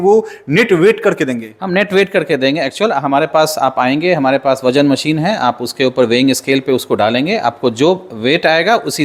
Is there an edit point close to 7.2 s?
no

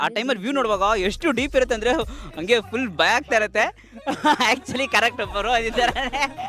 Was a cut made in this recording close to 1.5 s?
no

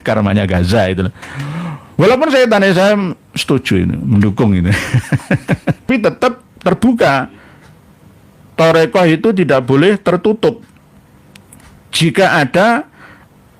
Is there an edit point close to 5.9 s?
yes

